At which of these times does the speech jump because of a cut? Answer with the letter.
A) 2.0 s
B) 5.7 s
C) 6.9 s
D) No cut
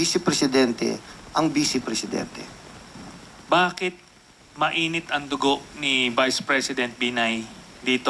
A